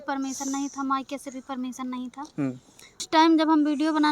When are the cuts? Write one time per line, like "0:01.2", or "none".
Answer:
0:03.1